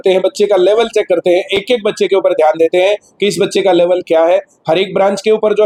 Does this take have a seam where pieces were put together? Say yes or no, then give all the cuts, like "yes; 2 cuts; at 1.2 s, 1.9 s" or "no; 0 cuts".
no; 0 cuts